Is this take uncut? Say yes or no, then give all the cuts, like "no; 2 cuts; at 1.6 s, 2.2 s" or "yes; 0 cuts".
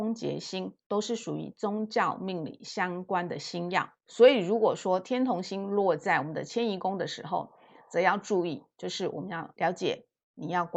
no; 1 cut; at 4.0 s